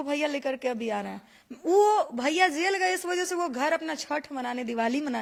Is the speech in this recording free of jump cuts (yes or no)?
yes